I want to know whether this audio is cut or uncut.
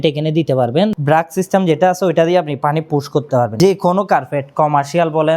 cut